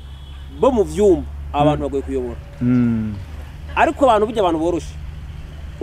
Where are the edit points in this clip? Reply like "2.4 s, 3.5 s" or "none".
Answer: none